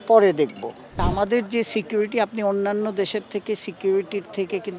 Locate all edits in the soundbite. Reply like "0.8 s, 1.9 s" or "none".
1.0 s